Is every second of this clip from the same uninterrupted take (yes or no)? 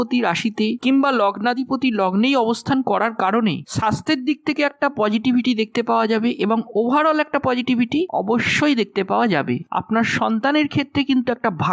no